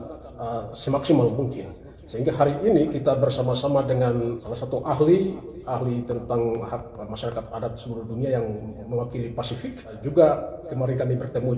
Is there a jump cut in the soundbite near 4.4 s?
yes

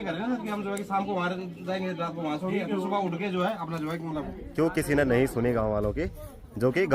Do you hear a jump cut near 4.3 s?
yes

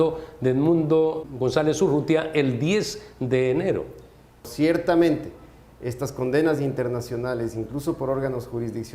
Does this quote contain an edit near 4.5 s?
yes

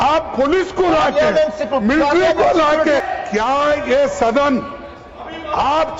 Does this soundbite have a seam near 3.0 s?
yes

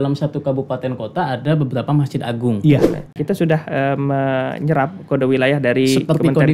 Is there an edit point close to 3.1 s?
yes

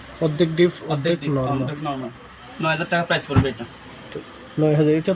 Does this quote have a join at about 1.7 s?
no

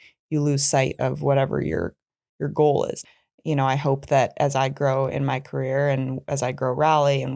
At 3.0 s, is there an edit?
yes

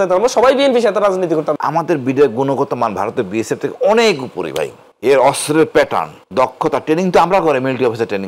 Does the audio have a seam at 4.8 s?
yes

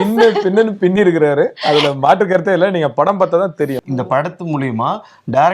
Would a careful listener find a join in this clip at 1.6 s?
no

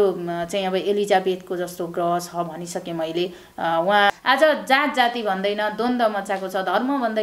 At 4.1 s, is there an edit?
yes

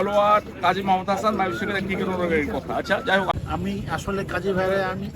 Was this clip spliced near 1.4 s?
no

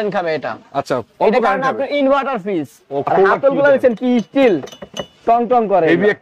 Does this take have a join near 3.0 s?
yes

